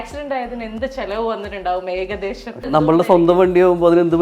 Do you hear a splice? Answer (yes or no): yes